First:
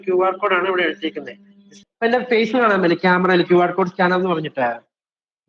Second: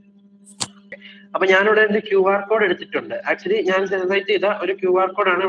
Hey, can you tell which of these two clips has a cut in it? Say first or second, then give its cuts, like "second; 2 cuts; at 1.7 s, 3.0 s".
first; 1 cut; at 1.8 s